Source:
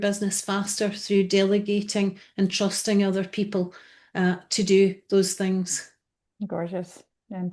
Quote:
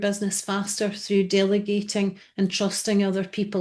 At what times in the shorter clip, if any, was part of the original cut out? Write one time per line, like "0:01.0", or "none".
none